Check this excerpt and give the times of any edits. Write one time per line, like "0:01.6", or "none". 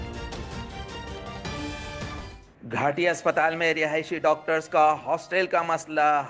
0:02.4